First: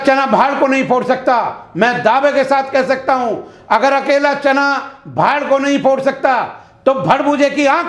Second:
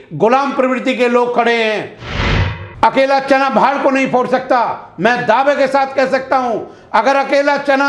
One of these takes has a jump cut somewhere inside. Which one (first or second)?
second